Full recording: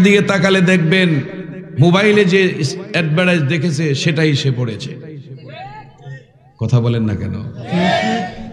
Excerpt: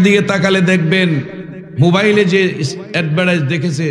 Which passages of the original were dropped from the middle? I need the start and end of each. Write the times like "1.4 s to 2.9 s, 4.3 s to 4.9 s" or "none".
none